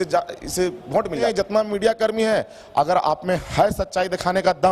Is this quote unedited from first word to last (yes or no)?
no